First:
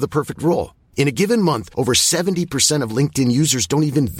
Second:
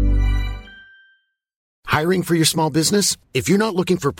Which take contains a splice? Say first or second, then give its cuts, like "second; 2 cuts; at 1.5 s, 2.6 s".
second; 1 cut; at 1.6 s